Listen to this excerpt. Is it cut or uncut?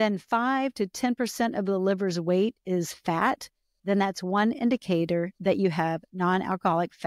uncut